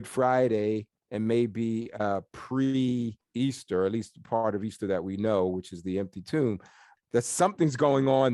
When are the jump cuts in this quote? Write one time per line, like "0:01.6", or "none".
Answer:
0:01.0
0:03.2
0:06.9